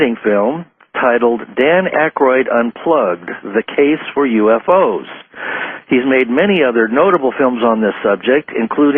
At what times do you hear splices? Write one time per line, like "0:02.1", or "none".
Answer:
0:03.7